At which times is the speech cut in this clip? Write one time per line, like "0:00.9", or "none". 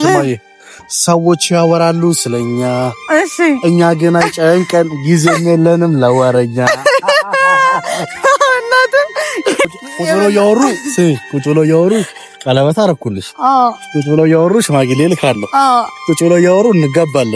0:09.7